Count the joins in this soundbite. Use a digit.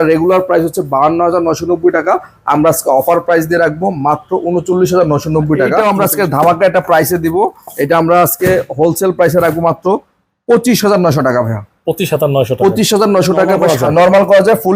2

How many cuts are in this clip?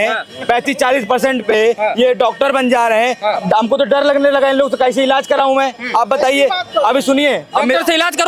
0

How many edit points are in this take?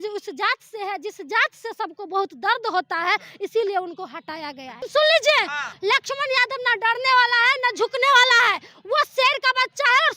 2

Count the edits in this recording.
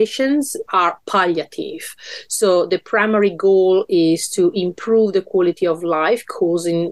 0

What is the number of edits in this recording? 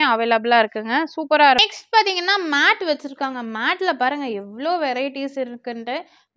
1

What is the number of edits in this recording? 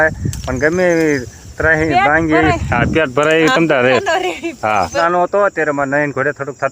1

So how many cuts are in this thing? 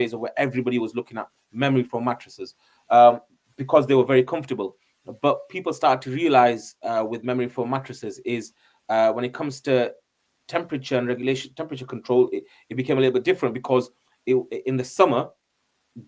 0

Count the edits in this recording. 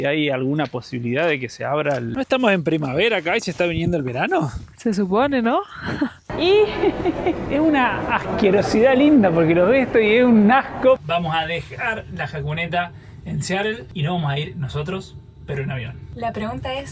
4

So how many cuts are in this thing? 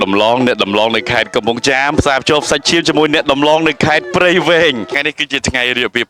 1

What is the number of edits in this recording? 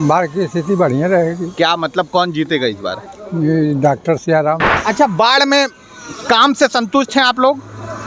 1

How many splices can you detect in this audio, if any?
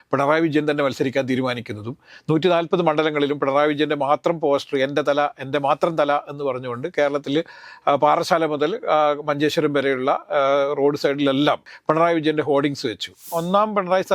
2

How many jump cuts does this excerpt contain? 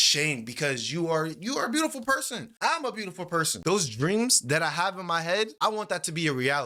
0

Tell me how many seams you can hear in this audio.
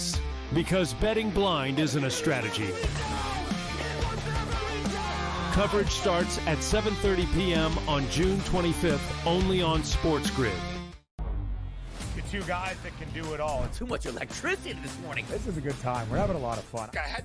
0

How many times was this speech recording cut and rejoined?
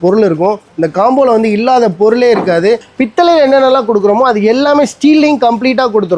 1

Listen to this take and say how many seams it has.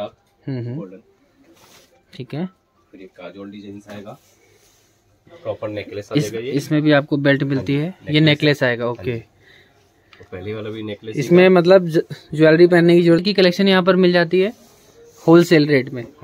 2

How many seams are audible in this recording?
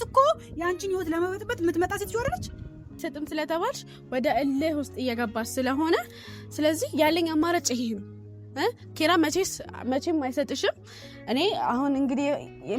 1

